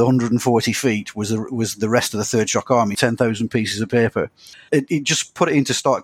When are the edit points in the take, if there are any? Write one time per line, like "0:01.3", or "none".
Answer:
0:02.9
0:04.7